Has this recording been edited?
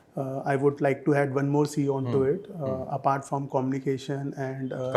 no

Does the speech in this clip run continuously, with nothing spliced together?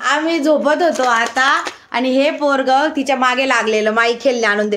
yes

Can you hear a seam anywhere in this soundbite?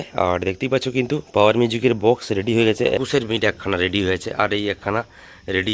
yes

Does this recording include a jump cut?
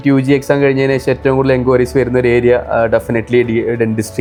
no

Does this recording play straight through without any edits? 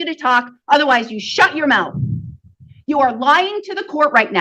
yes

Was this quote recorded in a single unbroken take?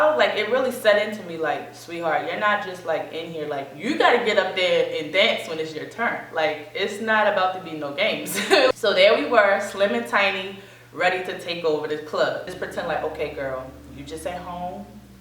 no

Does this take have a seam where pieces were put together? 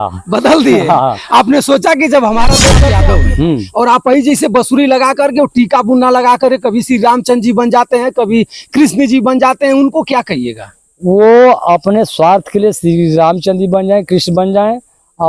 yes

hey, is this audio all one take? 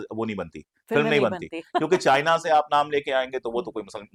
yes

